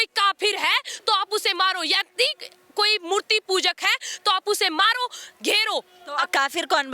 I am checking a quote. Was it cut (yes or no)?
no